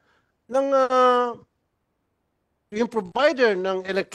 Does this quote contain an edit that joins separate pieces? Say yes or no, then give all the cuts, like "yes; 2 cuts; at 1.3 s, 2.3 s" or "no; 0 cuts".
no; 0 cuts